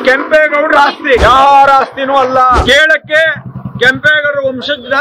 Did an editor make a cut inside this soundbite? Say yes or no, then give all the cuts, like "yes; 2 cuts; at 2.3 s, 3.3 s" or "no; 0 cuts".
yes; 2 cuts; at 1.2 s, 2.6 s